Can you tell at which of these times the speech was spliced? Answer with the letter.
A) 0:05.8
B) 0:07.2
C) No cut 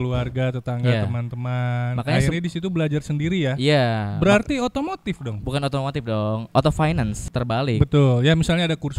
B